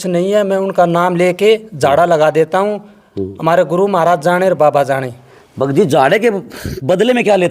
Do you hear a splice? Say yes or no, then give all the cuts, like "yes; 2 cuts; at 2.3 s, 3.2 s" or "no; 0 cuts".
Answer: no; 0 cuts